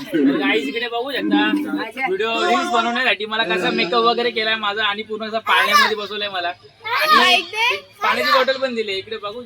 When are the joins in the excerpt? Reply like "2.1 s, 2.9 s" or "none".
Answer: none